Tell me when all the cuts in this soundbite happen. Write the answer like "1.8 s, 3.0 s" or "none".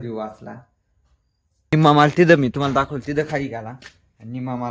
1.7 s